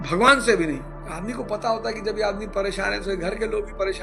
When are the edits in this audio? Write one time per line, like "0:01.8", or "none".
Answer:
none